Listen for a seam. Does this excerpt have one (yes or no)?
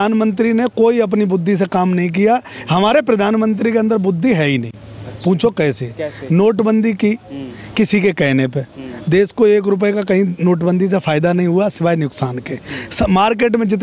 no